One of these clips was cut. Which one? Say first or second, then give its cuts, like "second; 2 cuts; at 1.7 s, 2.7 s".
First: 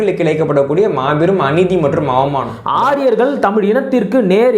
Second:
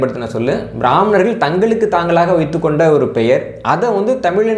first; 1 cut; at 2.6 s